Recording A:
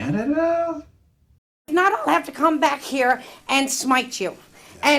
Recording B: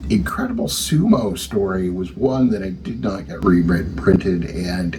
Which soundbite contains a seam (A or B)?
A